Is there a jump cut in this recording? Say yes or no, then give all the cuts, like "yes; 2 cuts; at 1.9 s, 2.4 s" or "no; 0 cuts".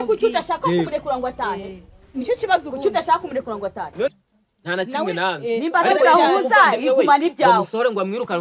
yes; 1 cut; at 4.1 s